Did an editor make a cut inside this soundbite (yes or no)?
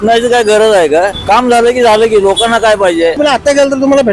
yes